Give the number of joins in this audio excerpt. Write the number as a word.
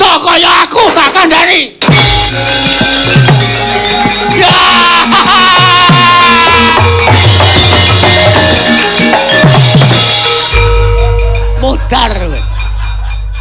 two